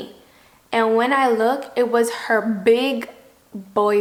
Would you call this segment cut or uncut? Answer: uncut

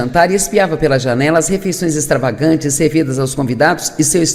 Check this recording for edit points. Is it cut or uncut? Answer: cut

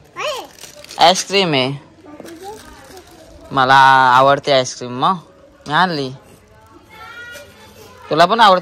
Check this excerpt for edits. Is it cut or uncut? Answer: uncut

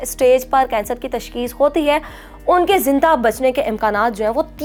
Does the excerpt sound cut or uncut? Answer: uncut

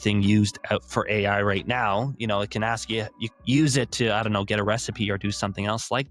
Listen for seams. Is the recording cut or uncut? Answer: cut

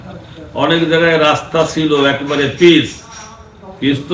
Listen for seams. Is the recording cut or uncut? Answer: uncut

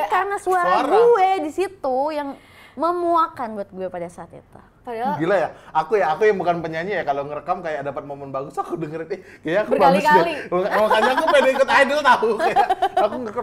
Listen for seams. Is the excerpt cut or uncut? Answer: uncut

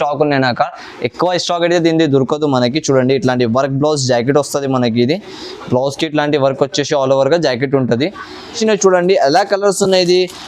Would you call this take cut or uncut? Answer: cut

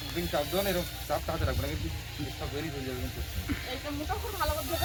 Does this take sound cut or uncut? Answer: uncut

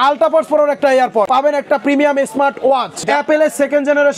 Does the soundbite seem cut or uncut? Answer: cut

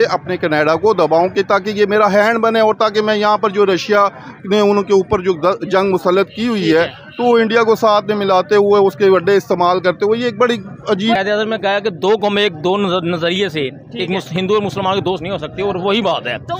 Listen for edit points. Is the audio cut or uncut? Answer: cut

